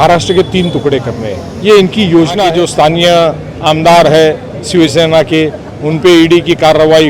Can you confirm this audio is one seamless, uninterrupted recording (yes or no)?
no